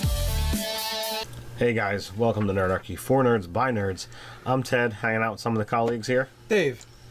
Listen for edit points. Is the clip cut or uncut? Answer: uncut